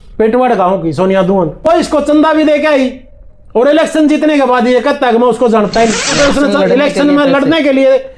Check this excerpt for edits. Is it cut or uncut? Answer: cut